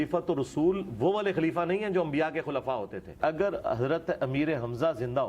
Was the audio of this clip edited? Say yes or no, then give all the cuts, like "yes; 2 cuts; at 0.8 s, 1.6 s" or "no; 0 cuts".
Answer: yes; 1 cut; at 3.2 s